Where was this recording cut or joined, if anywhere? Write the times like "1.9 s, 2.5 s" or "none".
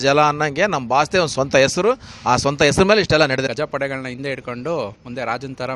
3.5 s